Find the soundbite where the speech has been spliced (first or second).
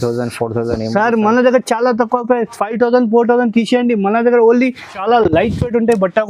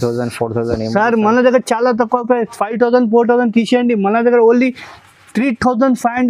first